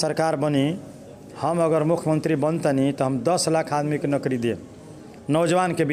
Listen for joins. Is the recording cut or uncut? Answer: uncut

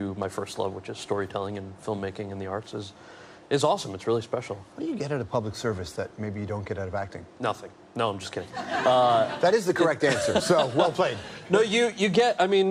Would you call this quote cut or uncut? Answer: uncut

